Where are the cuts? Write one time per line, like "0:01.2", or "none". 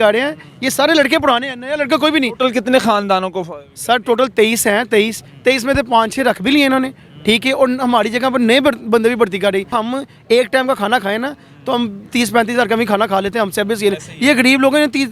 0:09.7